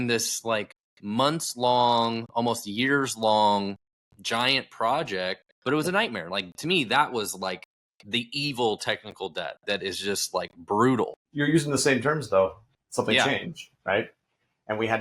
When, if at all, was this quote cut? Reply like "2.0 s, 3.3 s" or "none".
5.5 s, 11.2 s